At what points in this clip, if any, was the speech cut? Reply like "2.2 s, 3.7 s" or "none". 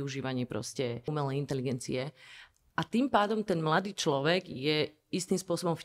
1.1 s